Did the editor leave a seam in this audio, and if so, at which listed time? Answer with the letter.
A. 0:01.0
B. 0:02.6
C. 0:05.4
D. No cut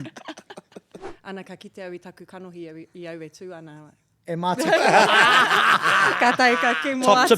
A